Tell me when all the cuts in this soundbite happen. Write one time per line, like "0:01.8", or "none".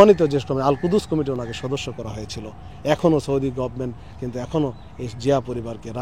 none